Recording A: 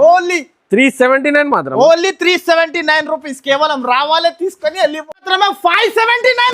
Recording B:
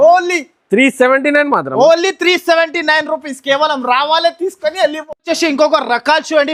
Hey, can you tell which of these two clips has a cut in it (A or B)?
A